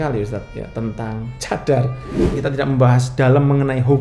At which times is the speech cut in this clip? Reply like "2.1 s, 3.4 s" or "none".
2.2 s